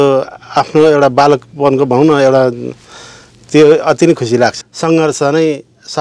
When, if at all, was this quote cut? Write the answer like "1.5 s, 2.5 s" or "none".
4.6 s